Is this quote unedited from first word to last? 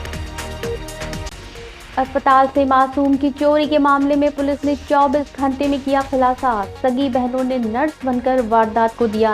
no; 1 cut; at 1.1 s

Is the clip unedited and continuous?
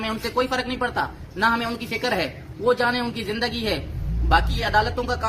yes; 0 cuts

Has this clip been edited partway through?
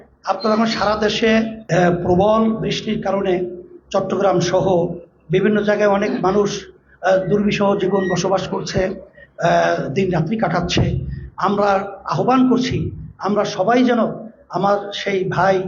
yes; 1 cut; at 1.6 s

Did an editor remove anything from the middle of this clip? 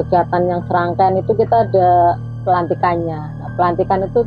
no; 0 cuts

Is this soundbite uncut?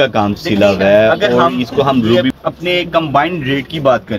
no; 1 cut; at 2.1 s

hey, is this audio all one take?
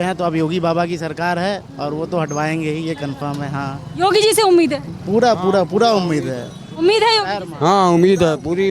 yes; 0 cuts

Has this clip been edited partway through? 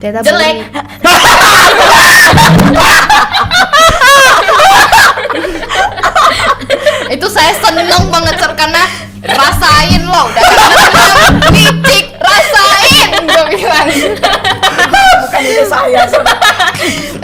no; 0 cuts

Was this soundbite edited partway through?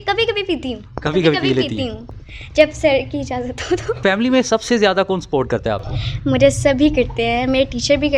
yes; 1 cut; at 4.0 s

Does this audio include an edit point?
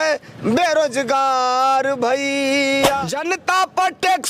yes; 1 cut; at 3.1 s

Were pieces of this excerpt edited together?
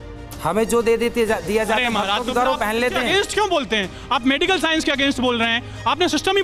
no; 0 cuts

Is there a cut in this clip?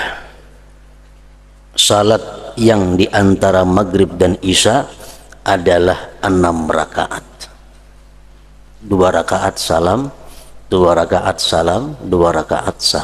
yes; 2 cuts; at 1.4 s, 8.6 s

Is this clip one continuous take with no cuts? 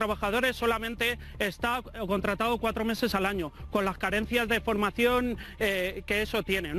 yes; 0 cuts

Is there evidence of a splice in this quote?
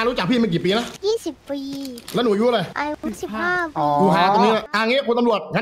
yes; 3 cuts; at 0.9 s, 2.7 s, 4.7 s

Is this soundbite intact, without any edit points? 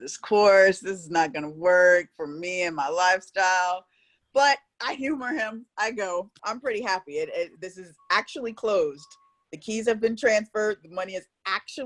no; 1 cut; at 6.4 s

